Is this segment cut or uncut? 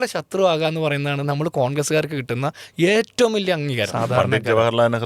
cut